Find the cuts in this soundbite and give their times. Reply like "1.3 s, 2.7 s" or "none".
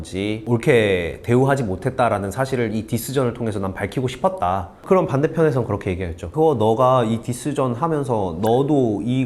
4.7 s, 6.3 s